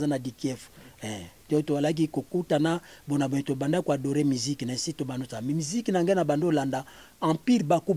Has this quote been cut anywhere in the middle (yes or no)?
no